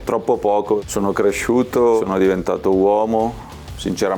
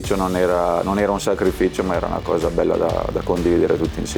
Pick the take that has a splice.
first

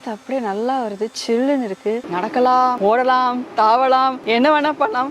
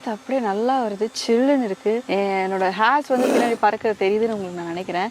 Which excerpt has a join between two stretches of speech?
first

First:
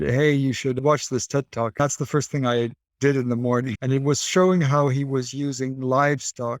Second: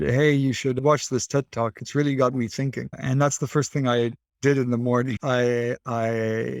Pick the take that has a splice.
first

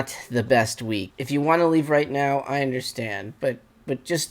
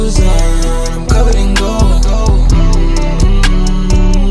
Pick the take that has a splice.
first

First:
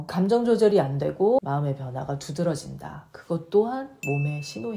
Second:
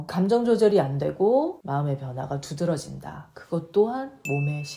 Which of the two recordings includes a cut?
first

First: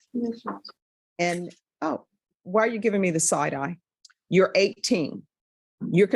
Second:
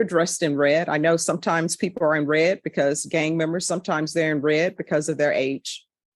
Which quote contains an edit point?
first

